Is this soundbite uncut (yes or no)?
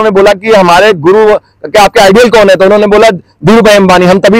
yes